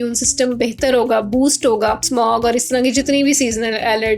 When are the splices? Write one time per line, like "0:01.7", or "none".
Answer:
0:02.0